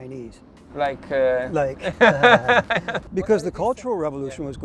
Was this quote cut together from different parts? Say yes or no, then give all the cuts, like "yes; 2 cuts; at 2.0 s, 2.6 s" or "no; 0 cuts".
yes; 1 cut; at 3.0 s